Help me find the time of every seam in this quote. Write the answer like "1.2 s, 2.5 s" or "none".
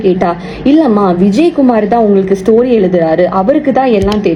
none